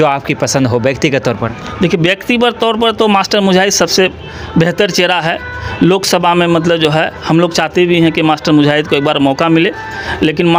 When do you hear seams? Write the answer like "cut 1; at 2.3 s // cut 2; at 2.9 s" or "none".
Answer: none